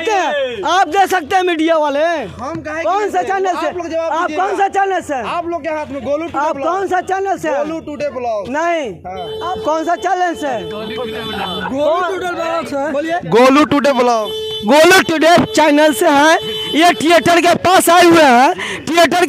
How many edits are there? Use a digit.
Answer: 0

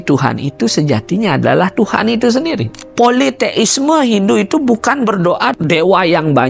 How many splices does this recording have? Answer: 2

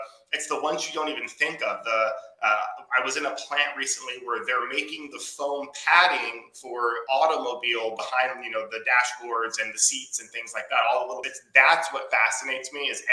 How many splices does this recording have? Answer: 1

